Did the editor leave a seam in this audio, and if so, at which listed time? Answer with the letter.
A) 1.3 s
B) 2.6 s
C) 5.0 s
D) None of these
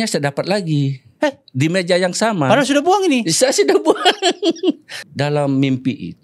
C